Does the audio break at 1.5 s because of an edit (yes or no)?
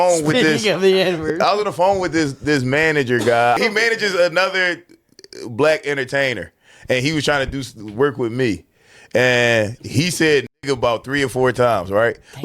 no